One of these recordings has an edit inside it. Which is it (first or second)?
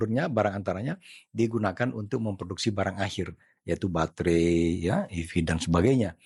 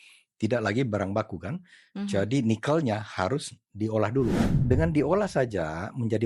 second